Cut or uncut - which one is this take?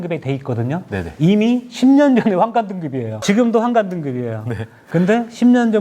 cut